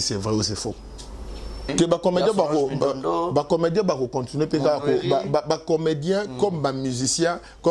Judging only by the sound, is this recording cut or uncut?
cut